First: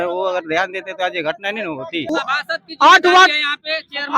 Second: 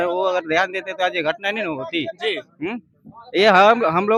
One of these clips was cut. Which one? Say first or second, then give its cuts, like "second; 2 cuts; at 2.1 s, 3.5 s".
first; 1 cut; at 2.0 s